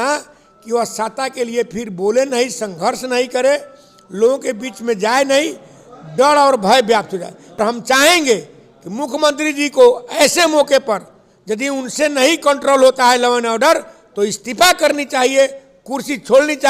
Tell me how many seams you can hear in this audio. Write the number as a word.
one